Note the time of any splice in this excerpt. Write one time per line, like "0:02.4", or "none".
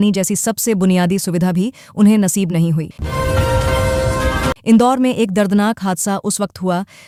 none